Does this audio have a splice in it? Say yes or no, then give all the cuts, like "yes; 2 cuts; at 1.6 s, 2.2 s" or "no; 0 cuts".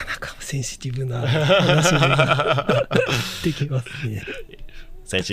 no; 0 cuts